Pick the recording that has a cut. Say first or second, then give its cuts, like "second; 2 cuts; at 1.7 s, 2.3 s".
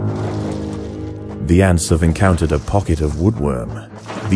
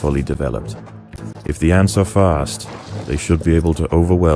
first; 1 cut; at 1.3 s